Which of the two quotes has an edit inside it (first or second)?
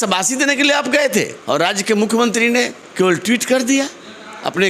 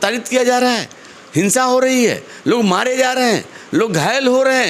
first